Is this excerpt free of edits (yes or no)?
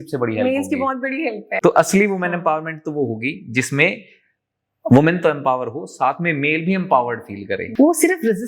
no